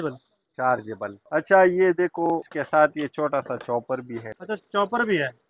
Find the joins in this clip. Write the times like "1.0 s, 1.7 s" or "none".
1.2 s, 2.5 s, 4.3 s